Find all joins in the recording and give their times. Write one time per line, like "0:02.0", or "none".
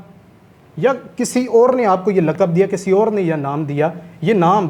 none